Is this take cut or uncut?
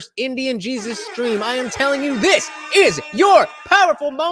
uncut